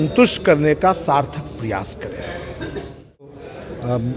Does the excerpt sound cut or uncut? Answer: uncut